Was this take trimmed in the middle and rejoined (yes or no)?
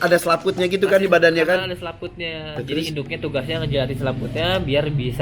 no